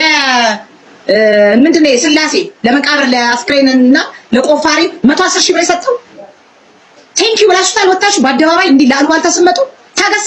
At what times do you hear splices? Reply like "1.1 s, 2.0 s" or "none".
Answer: none